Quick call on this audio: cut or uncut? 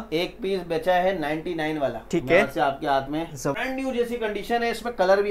cut